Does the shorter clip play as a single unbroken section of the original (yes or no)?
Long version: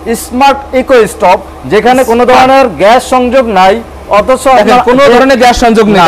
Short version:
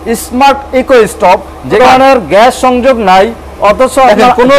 no